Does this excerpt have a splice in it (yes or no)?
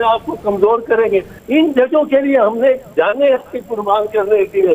yes